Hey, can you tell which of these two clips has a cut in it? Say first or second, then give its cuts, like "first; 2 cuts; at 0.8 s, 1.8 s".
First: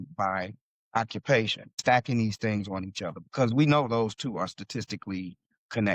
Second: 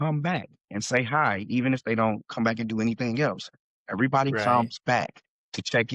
first; 1 cut; at 1.8 s